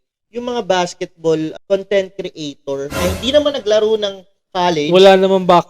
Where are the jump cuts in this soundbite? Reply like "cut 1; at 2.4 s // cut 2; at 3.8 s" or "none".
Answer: cut 1; at 3.0 s